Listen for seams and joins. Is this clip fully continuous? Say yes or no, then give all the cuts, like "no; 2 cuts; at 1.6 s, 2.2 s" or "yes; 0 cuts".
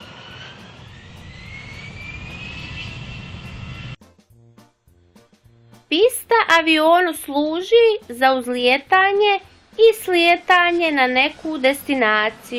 no; 1 cut; at 3.9 s